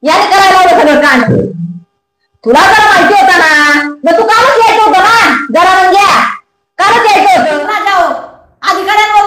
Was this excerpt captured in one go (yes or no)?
no